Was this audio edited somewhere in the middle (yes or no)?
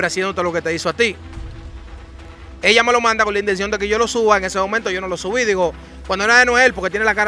no